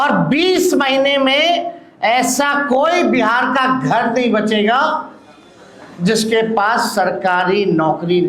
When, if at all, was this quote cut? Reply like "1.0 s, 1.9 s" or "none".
none